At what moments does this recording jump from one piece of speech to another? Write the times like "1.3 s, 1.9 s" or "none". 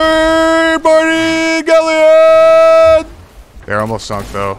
3.6 s